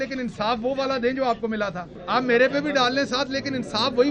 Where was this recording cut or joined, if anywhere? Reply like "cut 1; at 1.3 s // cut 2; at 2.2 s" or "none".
cut 1; at 1.9 s